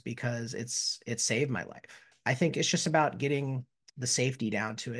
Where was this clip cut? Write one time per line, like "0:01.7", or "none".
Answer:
0:02.1